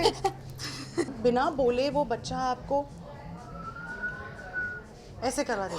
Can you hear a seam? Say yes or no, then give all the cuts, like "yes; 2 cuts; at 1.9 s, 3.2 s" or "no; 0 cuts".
yes; 1 cut; at 1.1 s